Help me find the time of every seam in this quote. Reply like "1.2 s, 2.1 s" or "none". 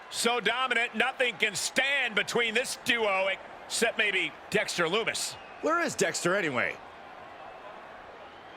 6.7 s